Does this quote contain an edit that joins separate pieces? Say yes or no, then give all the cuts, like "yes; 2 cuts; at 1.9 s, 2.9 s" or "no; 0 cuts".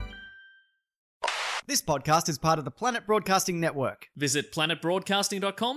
yes; 1 cut; at 1.1 s